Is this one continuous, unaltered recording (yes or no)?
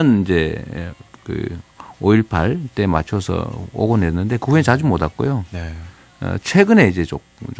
no